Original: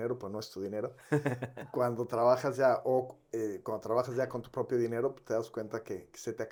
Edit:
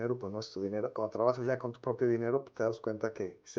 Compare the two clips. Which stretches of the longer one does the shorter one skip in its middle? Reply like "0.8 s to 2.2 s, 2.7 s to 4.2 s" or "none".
0.9 s to 3.6 s